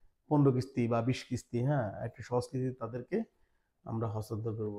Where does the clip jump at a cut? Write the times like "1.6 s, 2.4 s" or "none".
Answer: none